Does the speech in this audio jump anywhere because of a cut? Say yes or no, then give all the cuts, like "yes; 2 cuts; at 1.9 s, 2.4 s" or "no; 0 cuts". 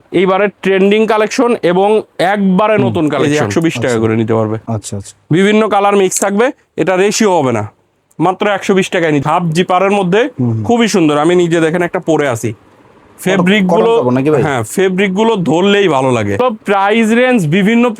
yes; 3 cuts; at 3.6 s, 9.2 s, 16.4 s